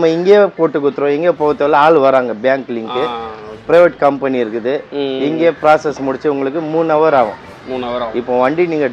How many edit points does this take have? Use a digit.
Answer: 0